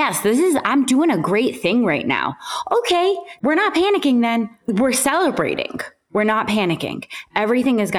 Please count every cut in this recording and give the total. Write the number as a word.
two